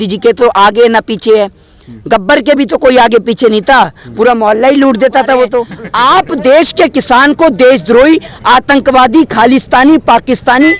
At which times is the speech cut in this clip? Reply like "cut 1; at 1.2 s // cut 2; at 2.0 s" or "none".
cut 1; at 5.8 s